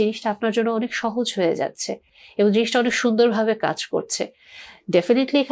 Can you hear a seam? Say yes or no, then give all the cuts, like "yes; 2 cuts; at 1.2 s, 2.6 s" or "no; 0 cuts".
no; 0 cuts